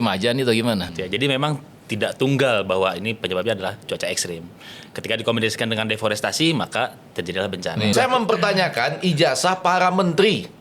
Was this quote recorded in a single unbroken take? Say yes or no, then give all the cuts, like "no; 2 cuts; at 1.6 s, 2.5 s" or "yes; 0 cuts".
no; 2 cuts; at 0.9 s, 7.9 s